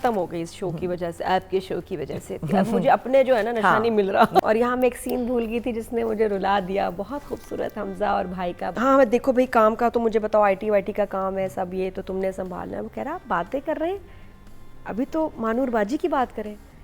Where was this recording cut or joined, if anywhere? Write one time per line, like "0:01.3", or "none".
0:04.4
0:08.7